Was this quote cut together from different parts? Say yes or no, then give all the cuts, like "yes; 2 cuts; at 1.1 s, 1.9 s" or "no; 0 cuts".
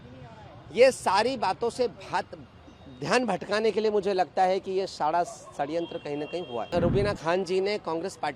yes; 1 cut; at 6.7 s